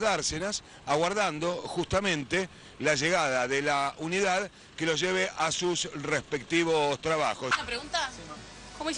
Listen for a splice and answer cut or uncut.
cut